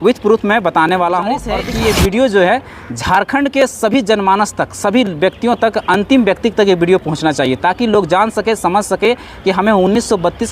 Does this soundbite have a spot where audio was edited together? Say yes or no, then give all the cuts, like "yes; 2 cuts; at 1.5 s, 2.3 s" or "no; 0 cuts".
yes; 1 cut; at 1.6 s